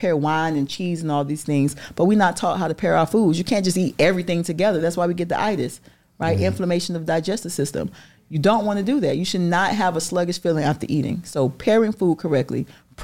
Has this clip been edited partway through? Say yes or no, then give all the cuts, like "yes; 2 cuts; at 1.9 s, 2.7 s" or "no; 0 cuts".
no; 0 cuts